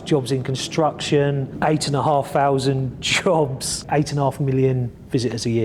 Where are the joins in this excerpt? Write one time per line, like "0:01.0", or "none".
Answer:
0:01.5
0:03.8